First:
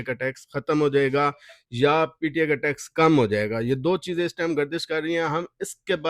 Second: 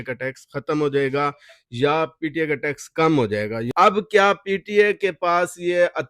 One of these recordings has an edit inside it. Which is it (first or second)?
second